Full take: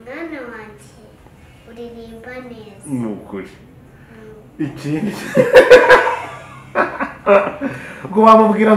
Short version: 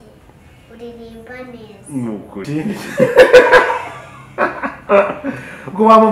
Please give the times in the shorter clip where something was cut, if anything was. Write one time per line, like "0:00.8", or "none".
0:02.5